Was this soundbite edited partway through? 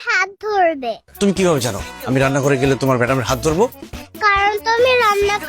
yes; 1 cut; at 1.0 s

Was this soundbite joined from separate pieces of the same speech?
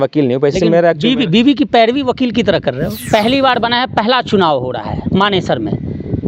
yes; 1 cut; at 3.0 s

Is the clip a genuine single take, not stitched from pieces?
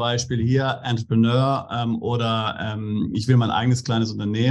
yes; 0 cuts

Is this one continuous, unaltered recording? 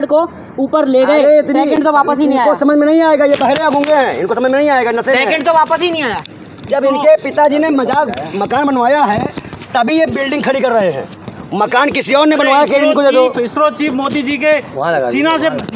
yes; 0 cuts

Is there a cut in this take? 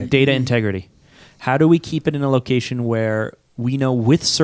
no; 0 cuts

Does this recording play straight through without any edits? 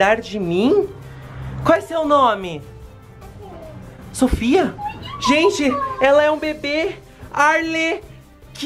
yes; 0 cuts

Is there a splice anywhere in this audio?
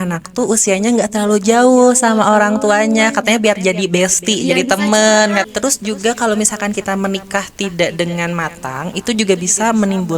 yes; 1 cut; at 5.5 s

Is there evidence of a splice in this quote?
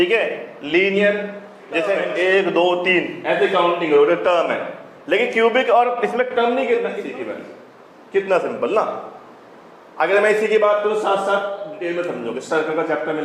yes; 3 cuts; at 2.0 s, 6.9 s, 11.8 s

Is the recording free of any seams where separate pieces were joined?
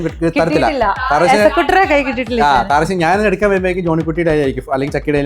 yes; 0 cuts

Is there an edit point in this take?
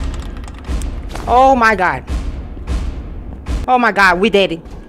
yes; 1 cut; at 3.6 s

